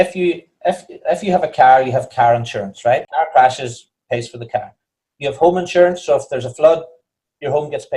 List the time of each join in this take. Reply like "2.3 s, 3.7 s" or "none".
3.1 s